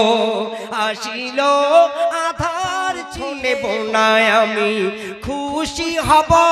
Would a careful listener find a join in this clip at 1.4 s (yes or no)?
no